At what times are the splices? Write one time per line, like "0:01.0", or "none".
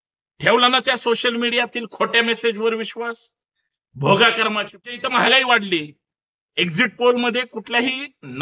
0:05.0